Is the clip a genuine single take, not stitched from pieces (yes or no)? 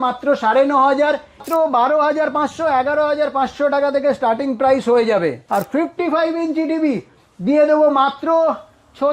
no